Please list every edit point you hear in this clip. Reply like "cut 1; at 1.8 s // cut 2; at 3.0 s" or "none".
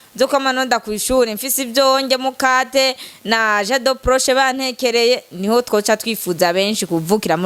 none

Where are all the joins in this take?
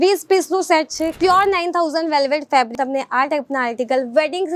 cut 1; at 1.1 s // cut 2; at 2.7 s

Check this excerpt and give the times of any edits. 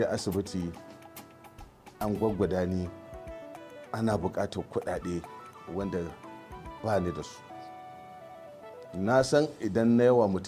none

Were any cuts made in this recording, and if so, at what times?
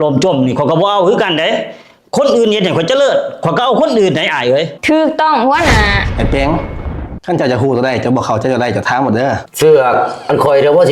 cut 1; at 6.0 s

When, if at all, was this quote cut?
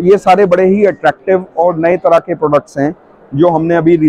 none

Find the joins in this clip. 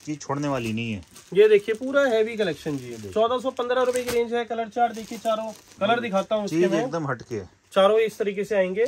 cut 1; at 5.6 s

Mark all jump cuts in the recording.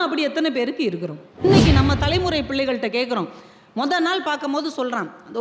cut 1; at 1.4 s

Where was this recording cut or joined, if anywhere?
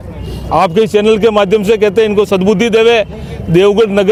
none

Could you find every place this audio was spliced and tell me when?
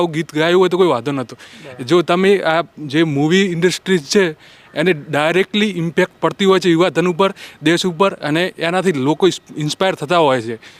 none

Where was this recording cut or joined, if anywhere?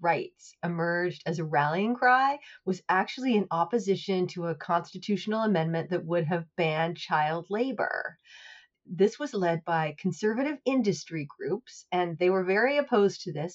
cut 1; at 8.7 s

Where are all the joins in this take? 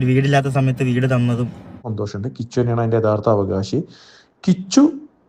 cut 1; at 1.9 s

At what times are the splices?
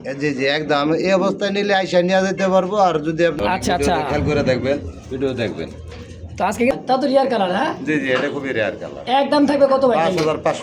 cut 1; at 3.4 s // cut 2; at 6.7 s

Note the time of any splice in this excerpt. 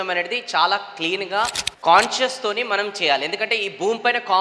cut 1; at 1.6 s

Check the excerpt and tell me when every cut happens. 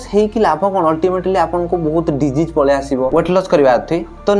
cut 1; at 3.1 s

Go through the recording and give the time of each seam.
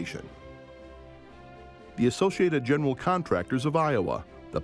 none

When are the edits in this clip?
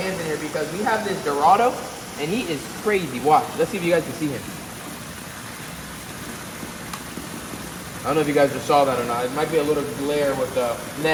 none

